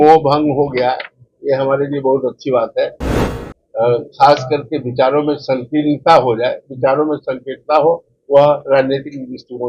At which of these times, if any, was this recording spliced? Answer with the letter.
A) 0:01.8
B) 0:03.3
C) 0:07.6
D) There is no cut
B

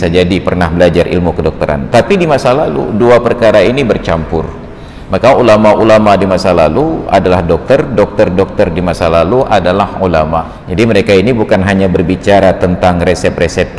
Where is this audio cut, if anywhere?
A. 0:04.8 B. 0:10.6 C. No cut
B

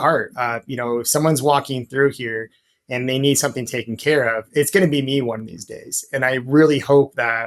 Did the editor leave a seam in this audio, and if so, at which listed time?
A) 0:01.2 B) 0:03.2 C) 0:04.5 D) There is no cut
D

